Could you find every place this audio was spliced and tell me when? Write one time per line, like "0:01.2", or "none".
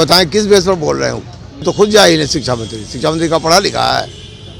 0:01.6

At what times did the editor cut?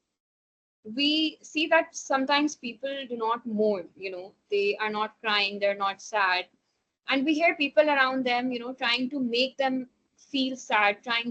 none

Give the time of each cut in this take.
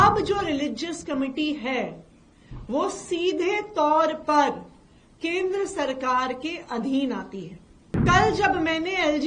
0:08.0

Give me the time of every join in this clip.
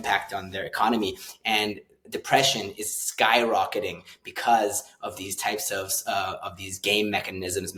none

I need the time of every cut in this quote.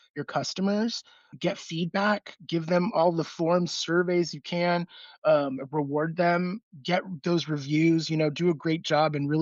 0:01.3
0:06.6

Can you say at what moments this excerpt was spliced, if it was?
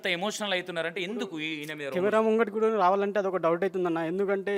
none

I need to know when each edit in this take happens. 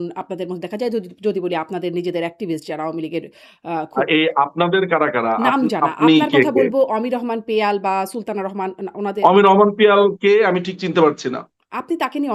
none

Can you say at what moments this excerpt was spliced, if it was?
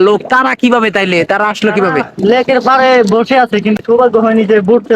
0:03.8

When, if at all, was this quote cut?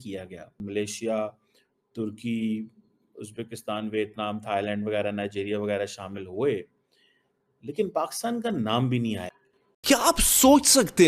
0:09.8

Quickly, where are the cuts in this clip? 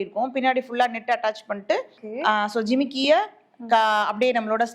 0:02.0

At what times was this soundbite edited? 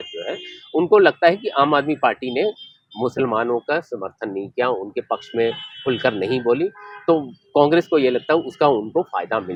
none

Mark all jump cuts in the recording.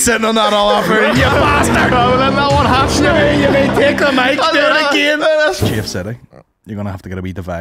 0:05.6

